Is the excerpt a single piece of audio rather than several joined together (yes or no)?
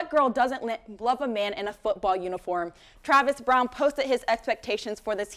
yes